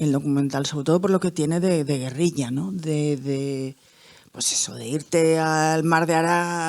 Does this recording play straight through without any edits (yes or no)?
yes